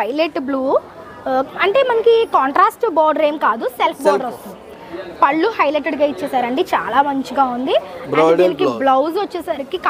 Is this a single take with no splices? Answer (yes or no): yes